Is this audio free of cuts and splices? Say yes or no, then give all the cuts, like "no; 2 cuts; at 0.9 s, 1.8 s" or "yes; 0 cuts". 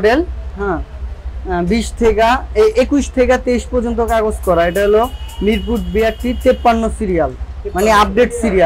yes; 0 cuts